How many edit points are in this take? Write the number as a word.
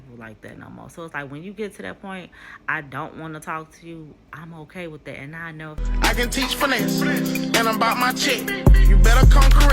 one